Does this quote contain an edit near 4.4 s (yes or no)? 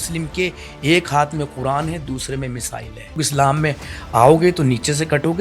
no